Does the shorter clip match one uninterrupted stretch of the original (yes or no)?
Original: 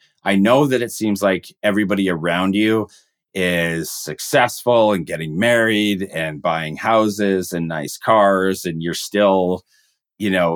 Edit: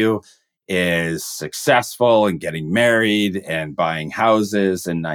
yes